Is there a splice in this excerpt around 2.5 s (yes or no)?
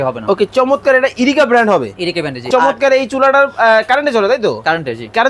yes